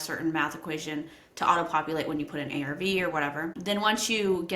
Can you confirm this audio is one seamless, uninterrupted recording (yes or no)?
no